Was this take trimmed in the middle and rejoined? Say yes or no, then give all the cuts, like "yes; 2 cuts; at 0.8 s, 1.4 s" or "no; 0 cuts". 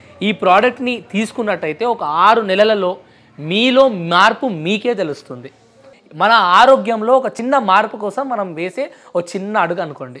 no; 0 cuts